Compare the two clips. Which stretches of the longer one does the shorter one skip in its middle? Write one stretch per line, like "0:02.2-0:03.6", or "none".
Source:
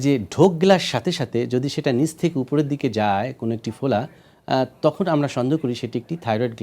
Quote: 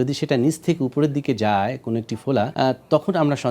0:04.1-0:04.4